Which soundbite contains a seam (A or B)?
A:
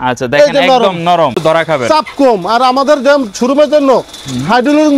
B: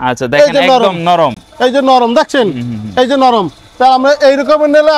A